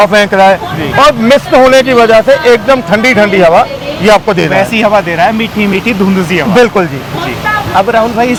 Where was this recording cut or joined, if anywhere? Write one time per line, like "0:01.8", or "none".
none